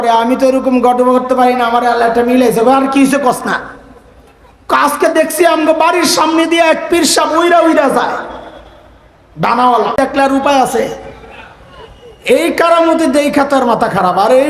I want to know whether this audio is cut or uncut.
cut